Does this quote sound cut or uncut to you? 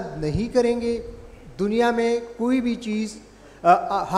uncut